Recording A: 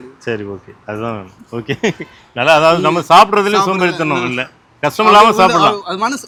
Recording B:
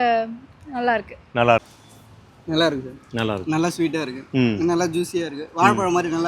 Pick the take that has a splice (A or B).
B